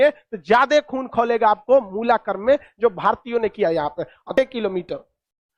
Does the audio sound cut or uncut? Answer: cut